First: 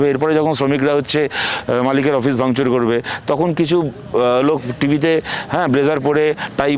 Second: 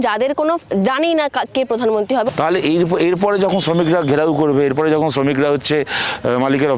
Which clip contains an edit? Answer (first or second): second